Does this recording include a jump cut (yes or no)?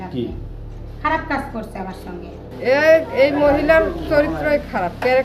yes